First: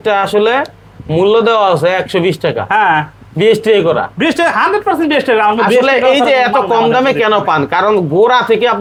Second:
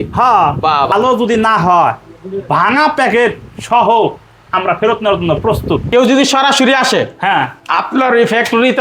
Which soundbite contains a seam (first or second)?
second